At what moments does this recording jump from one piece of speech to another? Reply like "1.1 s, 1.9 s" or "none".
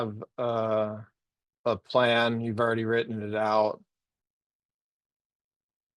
none